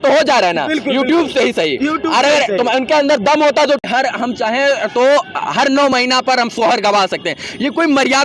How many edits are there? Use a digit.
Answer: 1